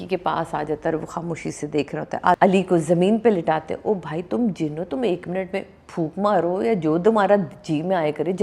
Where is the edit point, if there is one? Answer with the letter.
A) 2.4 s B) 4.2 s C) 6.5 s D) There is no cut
A